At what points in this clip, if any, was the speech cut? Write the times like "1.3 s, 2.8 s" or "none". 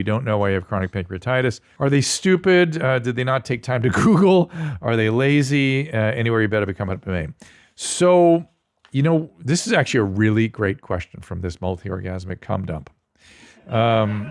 1.7 s